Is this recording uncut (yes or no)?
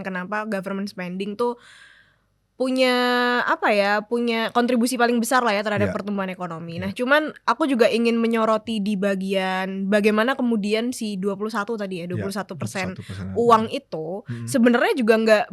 yes